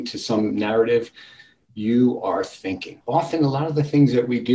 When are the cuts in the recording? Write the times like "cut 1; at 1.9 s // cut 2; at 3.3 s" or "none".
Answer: cut 1; at 2.9 s